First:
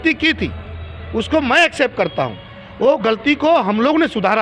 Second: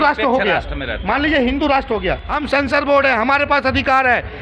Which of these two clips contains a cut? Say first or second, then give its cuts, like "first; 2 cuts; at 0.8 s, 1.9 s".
second; 1 cut; at 2.3 s